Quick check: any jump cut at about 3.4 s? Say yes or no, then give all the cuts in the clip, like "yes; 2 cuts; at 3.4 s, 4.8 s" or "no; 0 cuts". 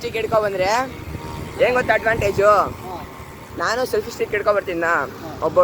no; 0 cuts